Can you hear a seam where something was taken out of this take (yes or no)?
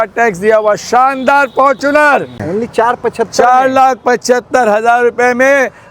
yes